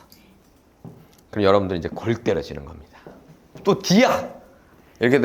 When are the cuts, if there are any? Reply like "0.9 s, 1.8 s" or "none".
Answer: 3.5 s